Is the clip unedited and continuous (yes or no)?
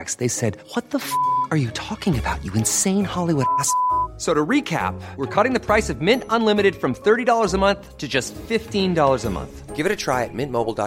yes